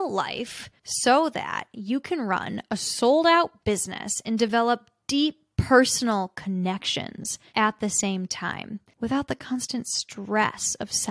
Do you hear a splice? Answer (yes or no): no